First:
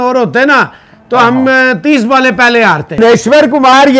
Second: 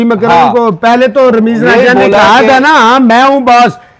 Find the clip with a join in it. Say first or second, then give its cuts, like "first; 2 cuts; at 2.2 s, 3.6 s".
first; 1 cut; at 3.0 s